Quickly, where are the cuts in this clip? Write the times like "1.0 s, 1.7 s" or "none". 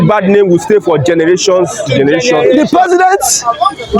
2.5 s